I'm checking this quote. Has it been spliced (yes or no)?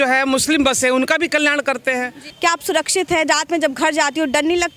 yes